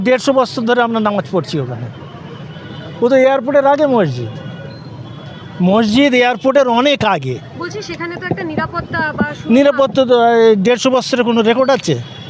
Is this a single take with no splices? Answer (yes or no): yes